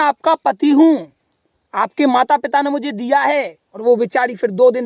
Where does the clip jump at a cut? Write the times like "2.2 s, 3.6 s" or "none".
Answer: 3.6 s